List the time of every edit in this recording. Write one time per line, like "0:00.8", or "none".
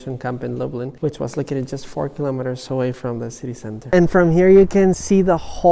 0:00.9
0:03.8